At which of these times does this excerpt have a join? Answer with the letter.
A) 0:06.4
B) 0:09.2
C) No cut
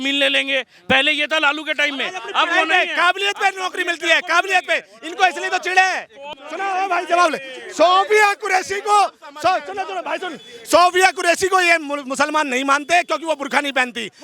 A